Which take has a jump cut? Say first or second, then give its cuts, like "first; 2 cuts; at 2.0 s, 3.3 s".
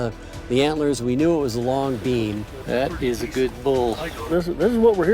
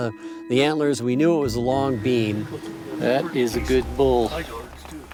first; 2 cuts; at 2.5 s, 4.3 s